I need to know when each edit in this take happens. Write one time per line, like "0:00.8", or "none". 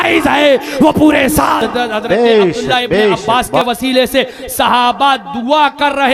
0:03.2

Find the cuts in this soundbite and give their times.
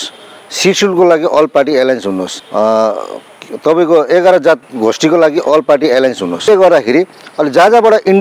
0:02.4
0:06.5

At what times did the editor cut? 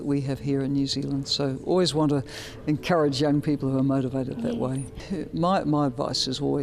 0:05.0

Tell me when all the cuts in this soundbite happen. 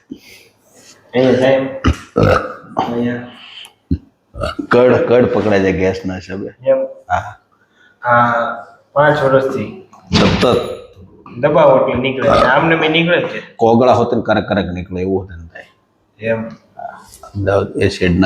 none

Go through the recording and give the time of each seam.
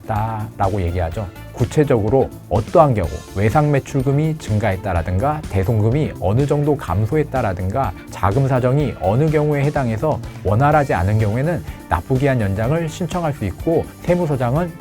0:01.5

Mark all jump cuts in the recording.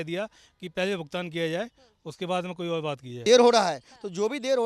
0:03.2

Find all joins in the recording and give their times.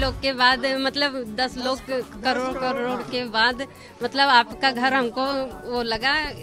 none

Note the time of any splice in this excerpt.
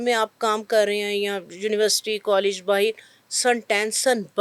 none

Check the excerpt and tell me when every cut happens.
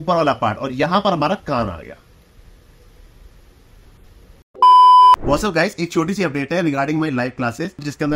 none

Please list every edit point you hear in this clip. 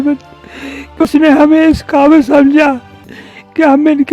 0:01.0

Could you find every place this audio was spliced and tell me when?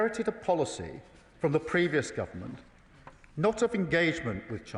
none

